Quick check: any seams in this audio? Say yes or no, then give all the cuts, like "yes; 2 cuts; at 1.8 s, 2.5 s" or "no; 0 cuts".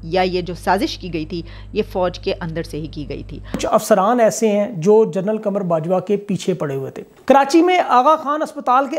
yes; 2 cuts; at 3.6 s, 7.1 s